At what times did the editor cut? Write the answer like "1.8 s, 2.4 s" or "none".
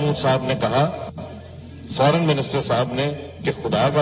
1.5 s